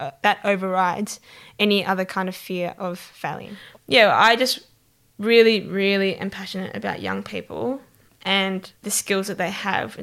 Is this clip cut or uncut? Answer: cut